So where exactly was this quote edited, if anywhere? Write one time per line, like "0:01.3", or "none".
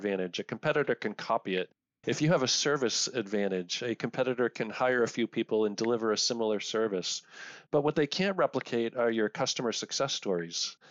none